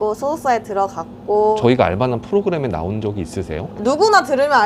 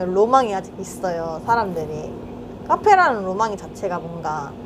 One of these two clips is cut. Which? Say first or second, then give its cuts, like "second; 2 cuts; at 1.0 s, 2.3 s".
first; 1 cut; at 1.6 s